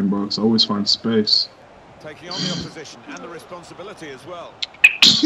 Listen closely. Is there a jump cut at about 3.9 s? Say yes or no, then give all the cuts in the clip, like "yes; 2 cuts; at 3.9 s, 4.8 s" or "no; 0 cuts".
no; 1 cut; at 1.5 s